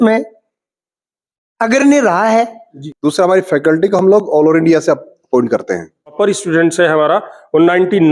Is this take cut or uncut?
cut